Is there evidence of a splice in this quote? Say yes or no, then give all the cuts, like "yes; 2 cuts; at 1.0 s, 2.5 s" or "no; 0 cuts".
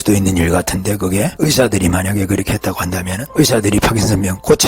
yes; 2 cuts; at 1.3 s, 3.2 s